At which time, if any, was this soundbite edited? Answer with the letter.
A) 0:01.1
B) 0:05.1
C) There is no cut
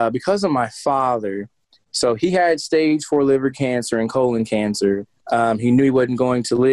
B